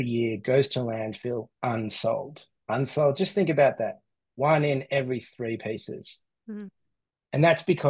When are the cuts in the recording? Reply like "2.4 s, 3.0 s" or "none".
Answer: 2.5 s